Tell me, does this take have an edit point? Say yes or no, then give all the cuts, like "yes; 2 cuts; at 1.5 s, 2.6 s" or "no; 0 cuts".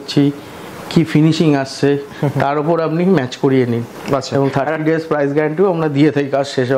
no; 0 cuts